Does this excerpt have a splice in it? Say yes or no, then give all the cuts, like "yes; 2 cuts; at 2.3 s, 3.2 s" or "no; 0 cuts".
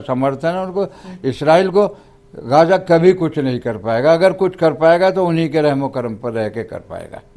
no; 0 cuts